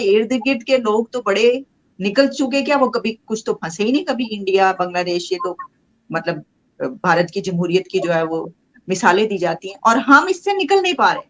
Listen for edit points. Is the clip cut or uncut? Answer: uncut